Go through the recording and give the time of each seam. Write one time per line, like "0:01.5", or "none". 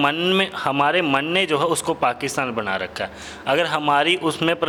none